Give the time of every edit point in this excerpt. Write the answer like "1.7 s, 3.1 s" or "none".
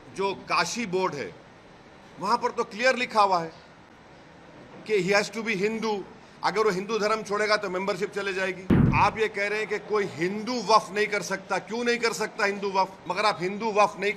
8.9 s, 13.0 s